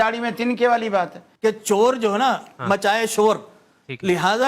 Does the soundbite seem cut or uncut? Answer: cut